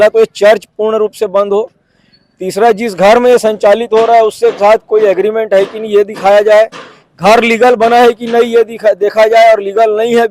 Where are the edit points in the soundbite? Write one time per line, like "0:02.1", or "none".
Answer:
none